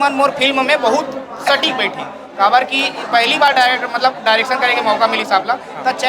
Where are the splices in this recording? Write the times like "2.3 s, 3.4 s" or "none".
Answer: none